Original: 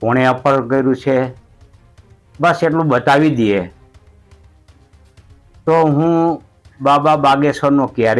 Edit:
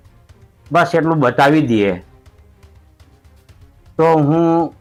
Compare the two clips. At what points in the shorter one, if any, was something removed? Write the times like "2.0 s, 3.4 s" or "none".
none